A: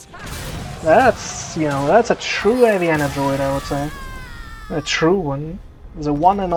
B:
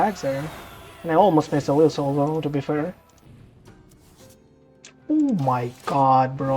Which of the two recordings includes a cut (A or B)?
B